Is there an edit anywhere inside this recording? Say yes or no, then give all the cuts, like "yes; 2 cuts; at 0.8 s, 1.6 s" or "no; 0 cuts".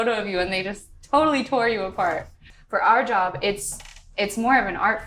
yes; 1 cut; at 2.5 s